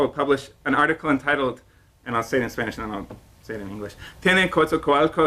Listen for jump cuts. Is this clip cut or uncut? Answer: uncut